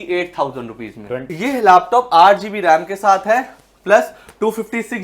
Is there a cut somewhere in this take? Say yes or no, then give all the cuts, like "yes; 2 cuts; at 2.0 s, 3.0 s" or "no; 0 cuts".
yes; 1 cut; at 1.3 s